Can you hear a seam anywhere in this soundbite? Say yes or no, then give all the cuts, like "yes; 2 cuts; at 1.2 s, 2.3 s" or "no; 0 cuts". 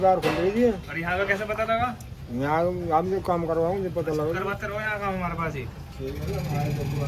no; 0 cuts